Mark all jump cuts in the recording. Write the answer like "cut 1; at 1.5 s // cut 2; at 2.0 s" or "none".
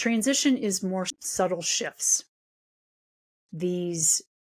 cut 1; at 1.1 s